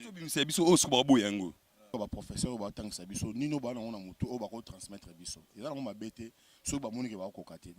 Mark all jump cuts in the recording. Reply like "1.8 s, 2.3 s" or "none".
1.9 s